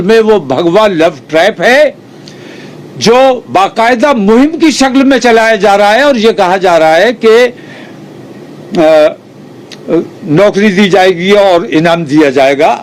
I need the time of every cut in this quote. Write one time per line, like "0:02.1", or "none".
none